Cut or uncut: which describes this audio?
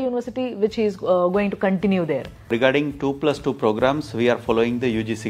cut